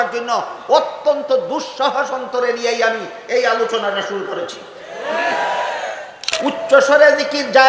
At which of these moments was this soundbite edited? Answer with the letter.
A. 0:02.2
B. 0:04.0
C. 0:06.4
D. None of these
C